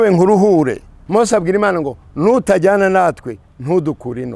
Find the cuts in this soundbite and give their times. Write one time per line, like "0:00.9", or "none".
0:00.9

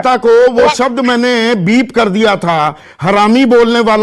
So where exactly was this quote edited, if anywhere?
none

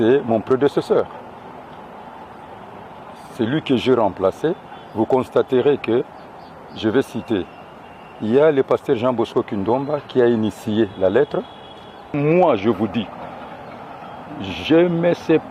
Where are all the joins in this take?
0:12.2

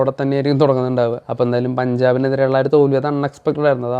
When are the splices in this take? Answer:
0:01.2

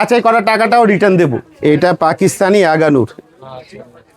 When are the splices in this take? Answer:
0:01.5

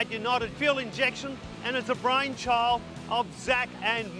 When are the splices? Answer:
none

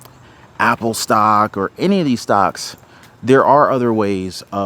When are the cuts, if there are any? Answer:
none

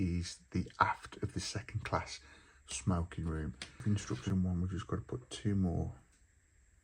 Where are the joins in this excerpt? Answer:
0:03.8

